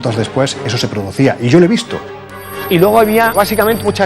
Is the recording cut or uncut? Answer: cut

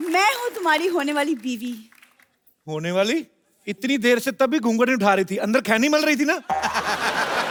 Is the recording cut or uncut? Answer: uncut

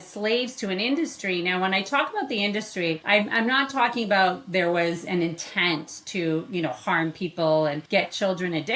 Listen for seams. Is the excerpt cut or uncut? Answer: cut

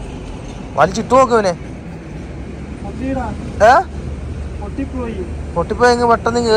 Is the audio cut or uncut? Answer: uncut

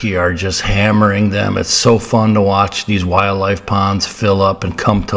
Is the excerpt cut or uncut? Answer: uncut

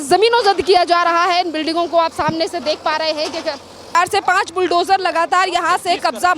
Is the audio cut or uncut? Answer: cut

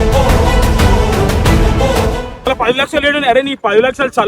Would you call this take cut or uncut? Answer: cut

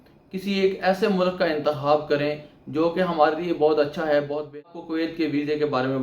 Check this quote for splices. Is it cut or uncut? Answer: cut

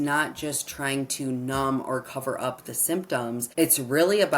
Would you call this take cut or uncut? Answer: cut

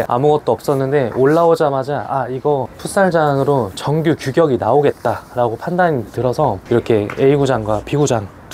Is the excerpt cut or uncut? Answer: uncut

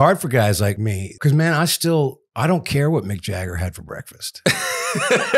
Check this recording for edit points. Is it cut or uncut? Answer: cut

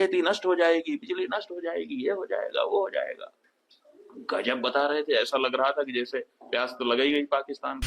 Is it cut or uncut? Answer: uncut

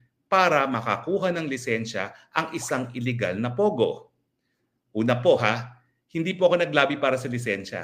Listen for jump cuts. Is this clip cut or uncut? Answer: uncut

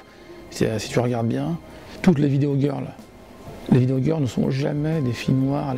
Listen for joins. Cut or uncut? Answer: uncut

